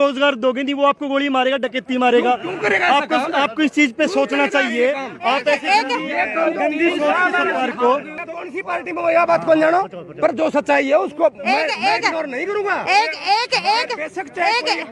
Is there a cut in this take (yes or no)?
yes